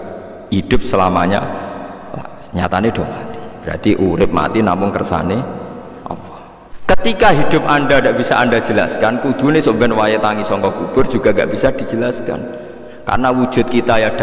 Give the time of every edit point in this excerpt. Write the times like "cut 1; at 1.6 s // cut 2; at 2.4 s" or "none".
cut 1; at 6.7 s